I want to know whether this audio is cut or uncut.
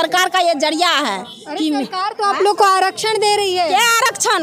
uncut